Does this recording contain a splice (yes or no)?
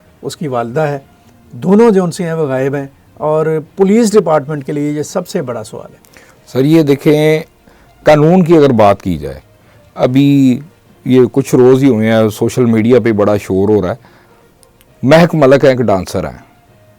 no